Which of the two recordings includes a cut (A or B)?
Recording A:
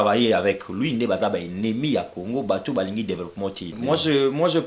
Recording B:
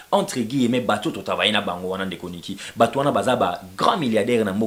A